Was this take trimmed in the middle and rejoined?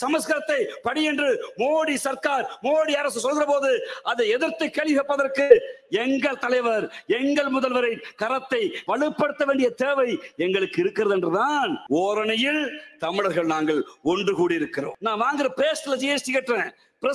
yes; 3 cuts; at 8.8 s, 11.8 s, 15.0 s

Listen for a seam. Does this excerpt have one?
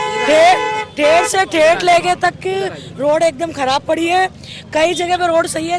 no; 0 cuts

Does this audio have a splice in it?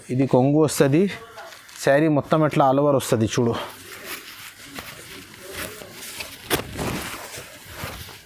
no; 0 cuts

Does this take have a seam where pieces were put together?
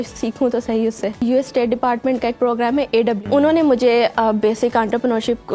yes; 2 cuts; at 1.2 s, 3.2 s

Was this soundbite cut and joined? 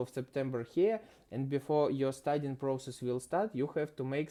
no; 0 cuts

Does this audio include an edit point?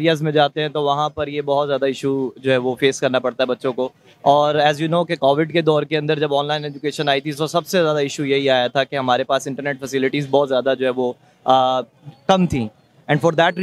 no; 0 cuts

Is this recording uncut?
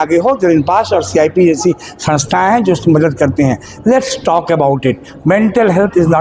yes; 0 cuts

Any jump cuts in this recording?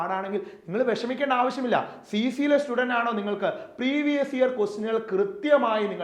no; 0 cuts

